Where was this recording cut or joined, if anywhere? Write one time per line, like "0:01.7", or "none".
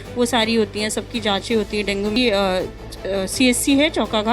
0:02.2